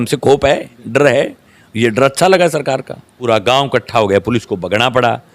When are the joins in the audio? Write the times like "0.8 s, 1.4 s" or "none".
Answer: 3.3 s